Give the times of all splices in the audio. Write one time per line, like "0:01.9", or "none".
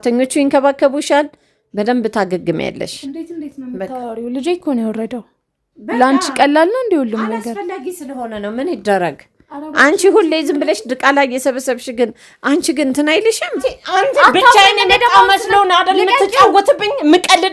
0:13.8